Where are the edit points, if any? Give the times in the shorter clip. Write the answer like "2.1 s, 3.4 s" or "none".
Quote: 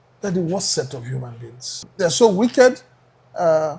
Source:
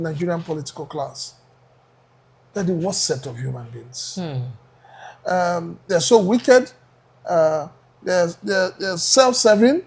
1.8 s